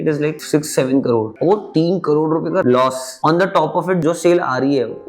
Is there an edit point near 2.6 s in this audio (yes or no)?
yes